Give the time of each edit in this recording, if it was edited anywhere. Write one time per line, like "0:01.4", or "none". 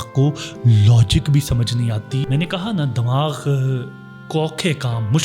0:02.3